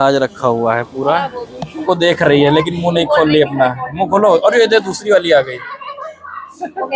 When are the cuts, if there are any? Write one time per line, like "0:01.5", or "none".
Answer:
0:01.8